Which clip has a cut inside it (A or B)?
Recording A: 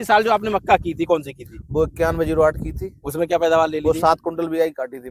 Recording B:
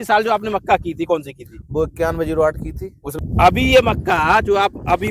B